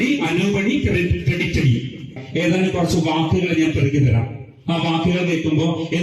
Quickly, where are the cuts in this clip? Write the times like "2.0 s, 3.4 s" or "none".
2.2 s